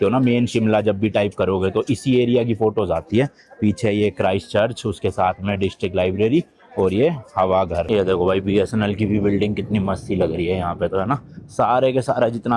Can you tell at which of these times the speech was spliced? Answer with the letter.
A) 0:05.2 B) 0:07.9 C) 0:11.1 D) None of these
B